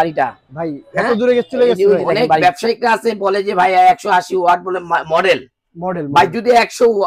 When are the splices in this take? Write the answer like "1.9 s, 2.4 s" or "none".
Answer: 2.4 s

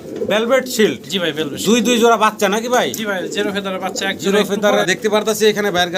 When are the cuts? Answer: 4.8 s

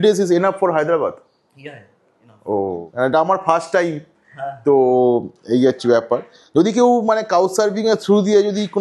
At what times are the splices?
2.9 s

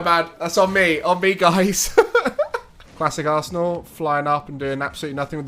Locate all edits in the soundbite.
2.8 s

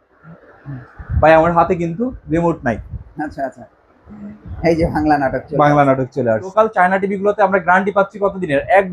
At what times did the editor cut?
6.5 s

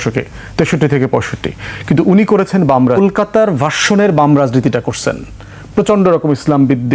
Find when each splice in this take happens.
3.0 s

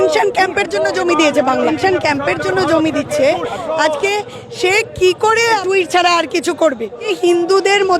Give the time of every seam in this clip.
1.7 s, 5.6 s, 7.1 s

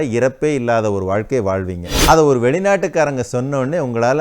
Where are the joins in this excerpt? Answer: 2.0 s

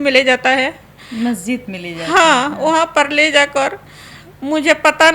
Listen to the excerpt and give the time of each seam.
none

